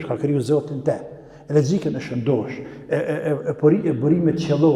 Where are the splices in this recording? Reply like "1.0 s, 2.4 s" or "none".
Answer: none